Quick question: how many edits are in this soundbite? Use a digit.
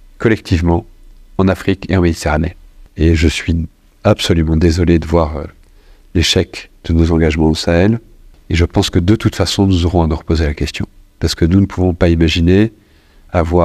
1